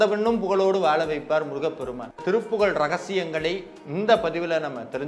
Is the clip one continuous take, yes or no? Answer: no